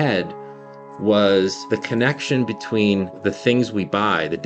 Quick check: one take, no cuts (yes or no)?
no